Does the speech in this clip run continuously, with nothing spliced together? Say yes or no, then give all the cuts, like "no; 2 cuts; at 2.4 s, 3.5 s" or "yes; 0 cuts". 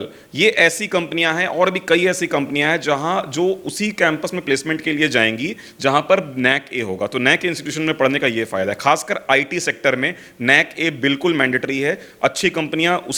yes; 0 cuts